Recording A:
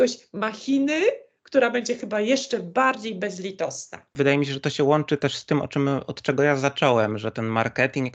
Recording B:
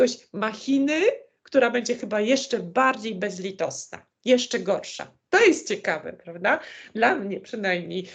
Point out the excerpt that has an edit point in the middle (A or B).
A